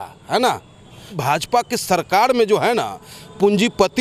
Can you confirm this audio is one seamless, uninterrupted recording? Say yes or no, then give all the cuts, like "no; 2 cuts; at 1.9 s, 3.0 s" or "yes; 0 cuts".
no; 1 cut; at 1.1 s